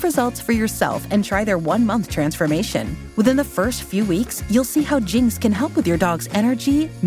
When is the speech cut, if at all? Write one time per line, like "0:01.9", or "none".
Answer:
none